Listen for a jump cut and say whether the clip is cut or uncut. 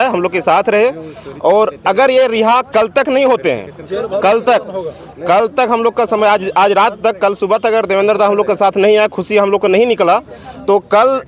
uncut